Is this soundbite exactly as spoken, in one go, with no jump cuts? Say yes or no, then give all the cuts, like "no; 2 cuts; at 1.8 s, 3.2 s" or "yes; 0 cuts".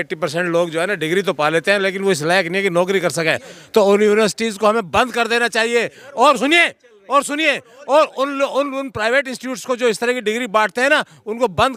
yes; 0 cuts